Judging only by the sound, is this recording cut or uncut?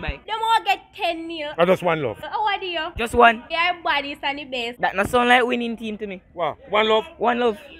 uncut